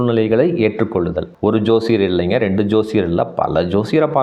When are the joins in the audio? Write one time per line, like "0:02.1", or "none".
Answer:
0:01.3